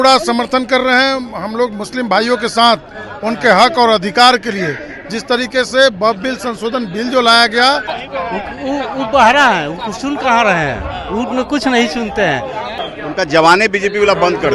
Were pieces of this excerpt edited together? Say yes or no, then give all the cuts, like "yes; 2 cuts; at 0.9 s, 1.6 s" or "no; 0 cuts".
yes; 2 cuts; at 8.0 s, 12.8 s